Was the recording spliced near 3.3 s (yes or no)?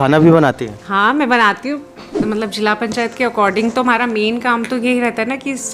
no